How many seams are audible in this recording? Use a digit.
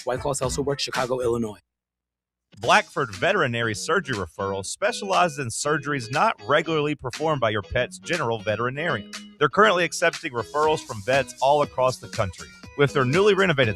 1